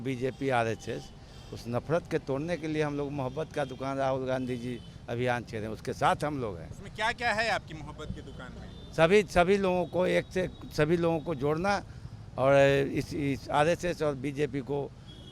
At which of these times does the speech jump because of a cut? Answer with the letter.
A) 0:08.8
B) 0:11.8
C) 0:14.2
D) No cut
D